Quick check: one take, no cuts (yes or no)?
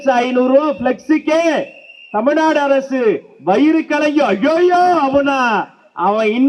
yes